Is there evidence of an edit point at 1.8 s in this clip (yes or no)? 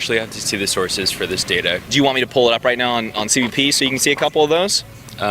yes